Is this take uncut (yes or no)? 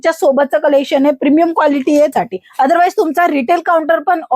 no